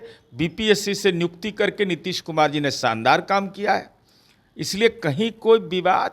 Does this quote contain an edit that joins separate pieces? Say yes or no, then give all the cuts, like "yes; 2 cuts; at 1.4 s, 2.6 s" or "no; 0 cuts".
no; 0 cuts